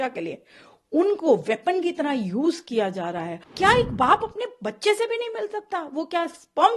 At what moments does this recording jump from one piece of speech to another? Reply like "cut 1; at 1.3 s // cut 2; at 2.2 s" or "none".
cut 1; at 3.4 s

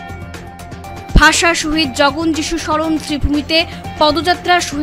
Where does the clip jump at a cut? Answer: none

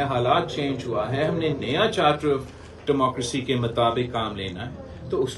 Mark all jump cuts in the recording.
none

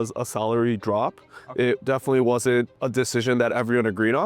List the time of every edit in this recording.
cut 1; at 2.8 s

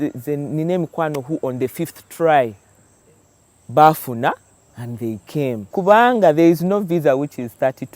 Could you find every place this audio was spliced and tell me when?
cut 1; at 5.7 s

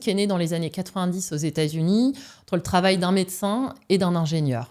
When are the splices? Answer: none

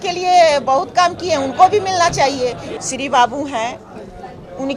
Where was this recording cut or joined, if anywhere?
cut 1; at 2.6 s

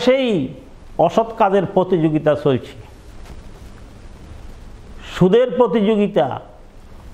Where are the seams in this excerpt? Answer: none

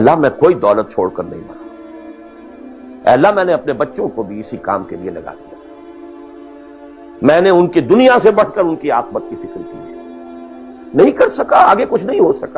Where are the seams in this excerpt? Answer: none

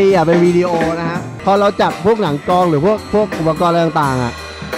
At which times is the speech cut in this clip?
cut 1; at 1.3 s

